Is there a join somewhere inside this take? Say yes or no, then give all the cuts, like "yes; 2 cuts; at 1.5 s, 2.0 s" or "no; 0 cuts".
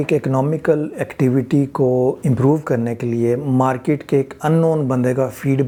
no; 0 cuts